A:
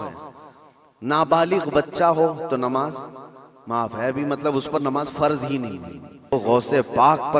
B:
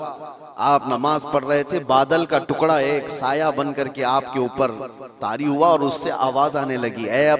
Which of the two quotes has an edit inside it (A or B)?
A